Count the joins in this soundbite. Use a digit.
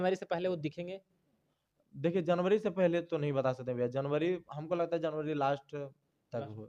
0